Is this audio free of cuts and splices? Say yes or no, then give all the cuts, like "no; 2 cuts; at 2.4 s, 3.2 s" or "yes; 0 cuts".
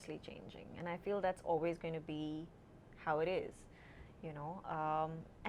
yes; 0 cuts